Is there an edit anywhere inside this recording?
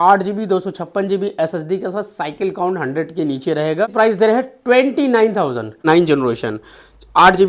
yes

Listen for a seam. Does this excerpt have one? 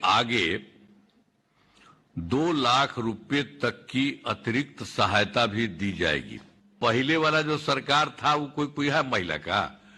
yes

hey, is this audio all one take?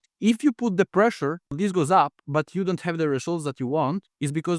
no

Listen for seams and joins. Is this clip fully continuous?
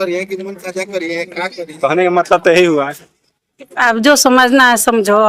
yes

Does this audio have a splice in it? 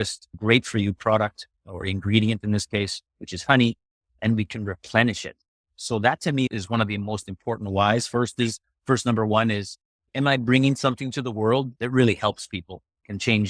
no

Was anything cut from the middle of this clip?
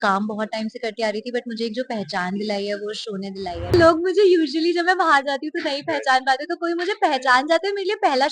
yes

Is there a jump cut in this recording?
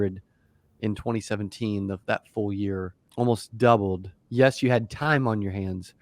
yes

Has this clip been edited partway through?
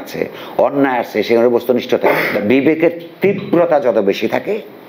yes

